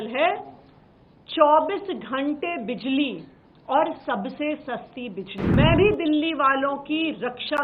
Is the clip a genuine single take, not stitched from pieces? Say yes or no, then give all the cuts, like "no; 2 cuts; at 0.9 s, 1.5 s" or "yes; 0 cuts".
no; 1 cut; at 5.6 s